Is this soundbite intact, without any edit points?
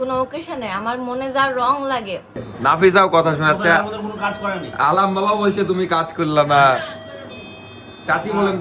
no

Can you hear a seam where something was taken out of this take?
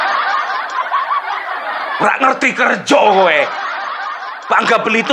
yes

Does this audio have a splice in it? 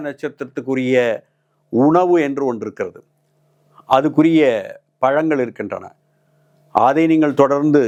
no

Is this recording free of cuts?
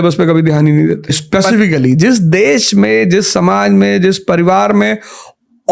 no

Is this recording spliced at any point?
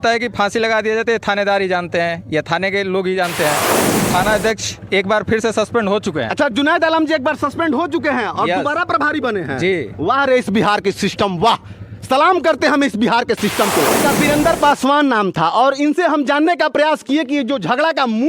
yes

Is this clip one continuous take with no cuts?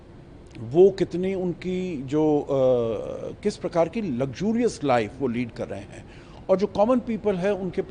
yes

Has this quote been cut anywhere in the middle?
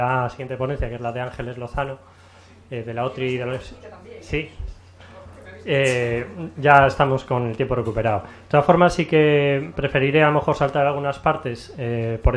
no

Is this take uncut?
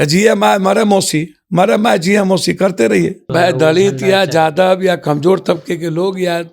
no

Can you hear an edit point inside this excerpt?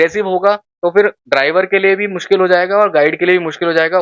no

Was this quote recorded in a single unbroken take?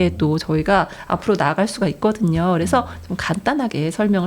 yes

